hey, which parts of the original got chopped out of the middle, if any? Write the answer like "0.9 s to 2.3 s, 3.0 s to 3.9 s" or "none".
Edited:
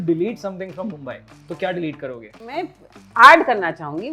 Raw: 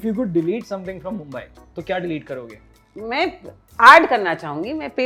2.8 s to 3.1 s